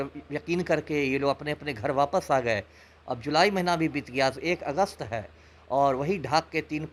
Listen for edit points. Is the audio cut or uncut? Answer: uncut